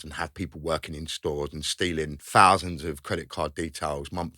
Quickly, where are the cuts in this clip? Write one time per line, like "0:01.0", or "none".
0:02.2